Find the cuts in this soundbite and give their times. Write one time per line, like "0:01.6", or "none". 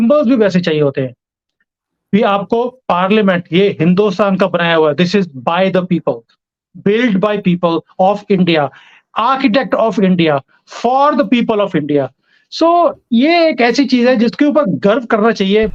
none